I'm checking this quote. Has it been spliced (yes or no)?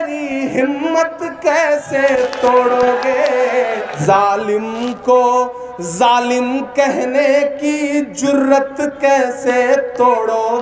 no